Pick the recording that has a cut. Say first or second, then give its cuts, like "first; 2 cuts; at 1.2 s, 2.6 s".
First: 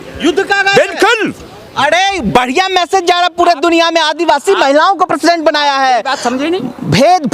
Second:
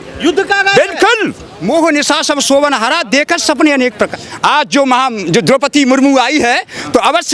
second; 2 cuts; at 1.5 s, 4.2 s